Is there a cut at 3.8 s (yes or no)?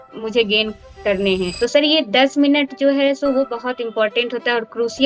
no